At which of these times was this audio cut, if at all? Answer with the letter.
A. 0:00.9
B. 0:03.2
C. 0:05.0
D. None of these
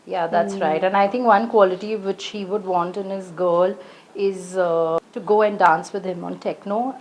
C